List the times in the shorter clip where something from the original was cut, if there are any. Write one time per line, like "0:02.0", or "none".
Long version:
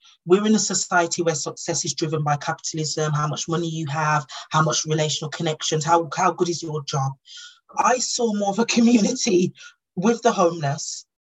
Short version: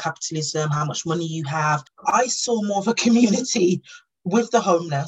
0:01.9